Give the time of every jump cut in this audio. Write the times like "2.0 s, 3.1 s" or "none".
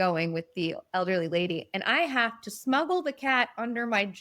none